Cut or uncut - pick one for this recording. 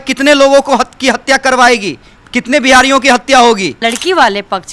cut